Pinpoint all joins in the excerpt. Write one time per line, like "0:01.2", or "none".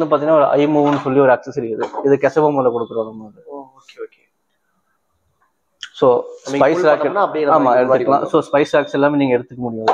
none